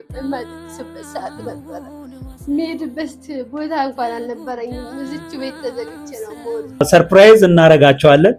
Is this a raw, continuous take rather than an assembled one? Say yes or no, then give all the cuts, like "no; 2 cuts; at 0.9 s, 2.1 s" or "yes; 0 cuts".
no; 1 cut; at 6.8 s